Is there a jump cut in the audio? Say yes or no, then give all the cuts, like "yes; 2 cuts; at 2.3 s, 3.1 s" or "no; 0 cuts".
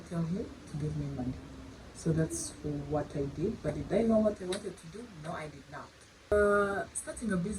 yes; 1 cut; at 6.3 s